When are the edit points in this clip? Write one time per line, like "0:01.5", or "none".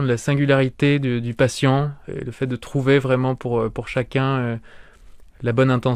0:02.0